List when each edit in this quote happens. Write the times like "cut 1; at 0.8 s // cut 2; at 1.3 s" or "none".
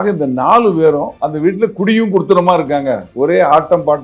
none